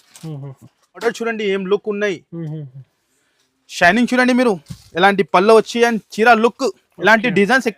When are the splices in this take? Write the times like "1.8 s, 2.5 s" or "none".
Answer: 1.1 s